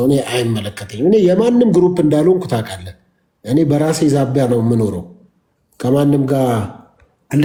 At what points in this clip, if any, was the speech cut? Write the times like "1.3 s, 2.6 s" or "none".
none